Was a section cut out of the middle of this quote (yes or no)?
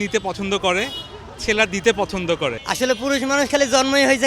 yes